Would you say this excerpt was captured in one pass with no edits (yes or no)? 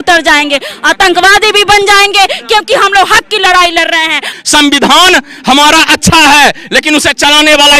no